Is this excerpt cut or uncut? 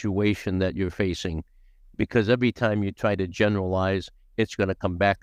uncut